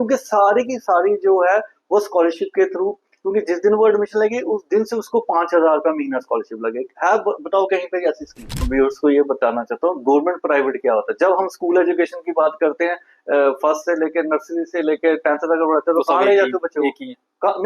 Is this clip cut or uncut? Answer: cut